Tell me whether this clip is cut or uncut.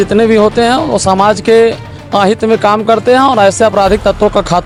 uncut